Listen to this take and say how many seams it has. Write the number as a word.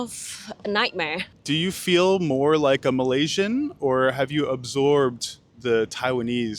one